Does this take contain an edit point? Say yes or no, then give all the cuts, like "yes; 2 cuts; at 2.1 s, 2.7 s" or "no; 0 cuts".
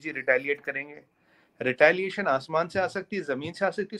no; 0 cuts